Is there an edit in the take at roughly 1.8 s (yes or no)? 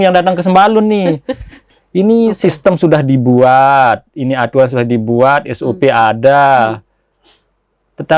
yes